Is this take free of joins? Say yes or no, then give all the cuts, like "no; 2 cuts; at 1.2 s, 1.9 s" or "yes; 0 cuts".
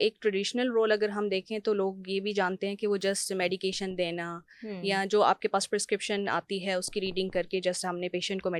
yes; 0 cuts